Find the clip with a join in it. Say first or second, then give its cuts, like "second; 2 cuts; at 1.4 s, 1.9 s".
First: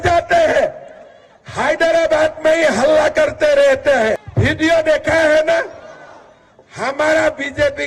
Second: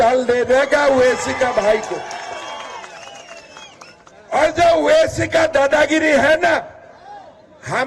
first; 1 cut; at 4.3 s